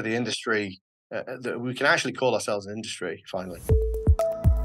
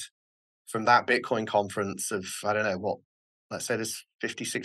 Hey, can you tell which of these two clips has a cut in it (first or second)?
first